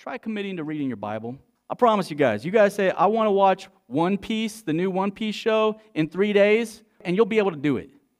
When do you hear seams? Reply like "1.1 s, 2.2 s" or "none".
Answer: 1.5 s, 7.0 s